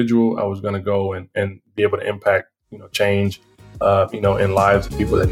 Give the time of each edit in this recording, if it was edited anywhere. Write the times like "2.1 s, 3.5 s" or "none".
none